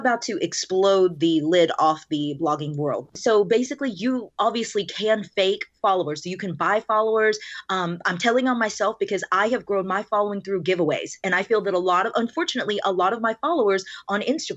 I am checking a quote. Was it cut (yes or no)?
yes